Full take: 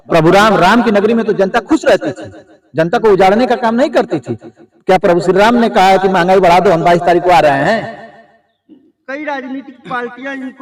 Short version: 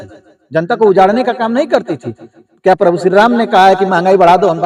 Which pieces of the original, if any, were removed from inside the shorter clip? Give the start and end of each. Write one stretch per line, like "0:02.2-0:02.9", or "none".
none